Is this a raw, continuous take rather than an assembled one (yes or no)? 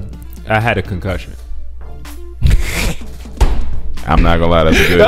yes